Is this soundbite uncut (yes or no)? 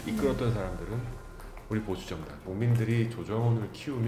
no